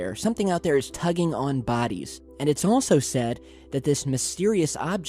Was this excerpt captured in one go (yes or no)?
yes